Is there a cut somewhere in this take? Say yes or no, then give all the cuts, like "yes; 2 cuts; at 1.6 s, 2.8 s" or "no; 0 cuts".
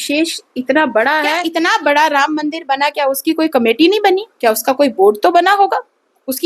yes; 1 cut; at 1.4 s